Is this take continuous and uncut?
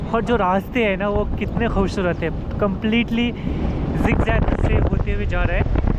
yes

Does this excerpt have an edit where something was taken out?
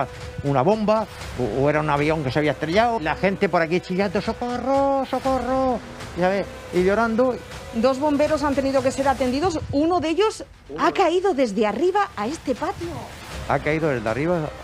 yes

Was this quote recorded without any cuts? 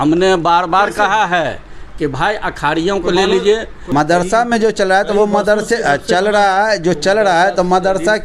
no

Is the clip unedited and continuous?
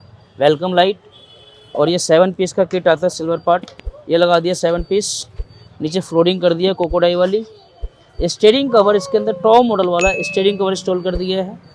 yes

